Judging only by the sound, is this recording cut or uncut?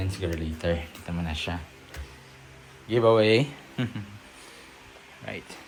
uncut